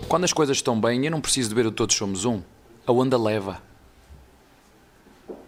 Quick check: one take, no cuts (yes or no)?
yes